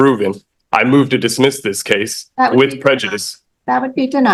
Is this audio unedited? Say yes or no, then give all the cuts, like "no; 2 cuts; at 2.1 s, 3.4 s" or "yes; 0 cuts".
yes; 0 cuts